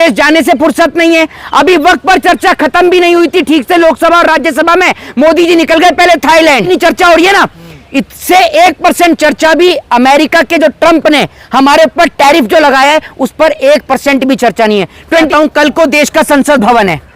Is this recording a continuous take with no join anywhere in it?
no; 2 cuts; at 6.6 s, 15.3 s

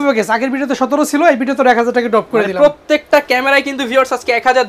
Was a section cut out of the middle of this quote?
no; 0 cuts

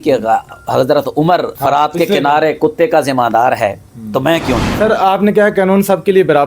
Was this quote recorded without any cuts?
no; 2 cuts; at 1.5 s, 4.7 s

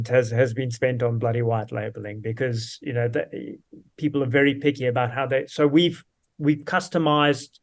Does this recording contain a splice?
no; 0 cuts

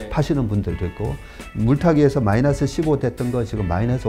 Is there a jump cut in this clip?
no; 0 cuts

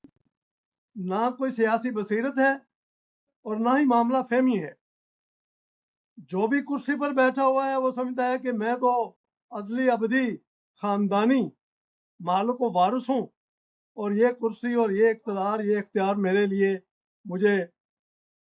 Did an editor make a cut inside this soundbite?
no; 0 cuts

